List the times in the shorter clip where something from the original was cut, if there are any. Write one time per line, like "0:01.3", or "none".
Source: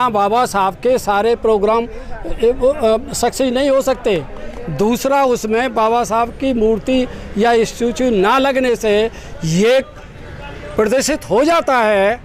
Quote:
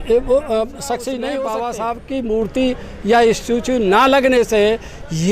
0:01.4